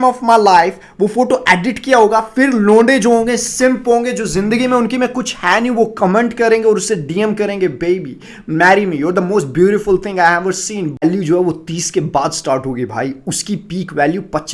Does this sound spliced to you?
yes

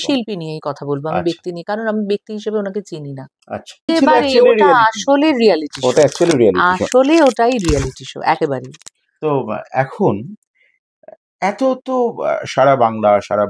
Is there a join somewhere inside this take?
yes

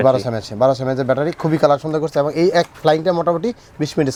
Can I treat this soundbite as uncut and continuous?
yes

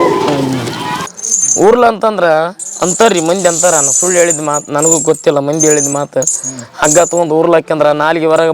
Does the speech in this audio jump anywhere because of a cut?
yes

